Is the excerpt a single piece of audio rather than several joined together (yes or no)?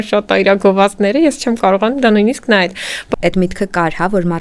no